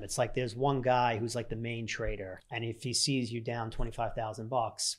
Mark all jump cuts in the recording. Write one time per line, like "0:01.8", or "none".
0:02.3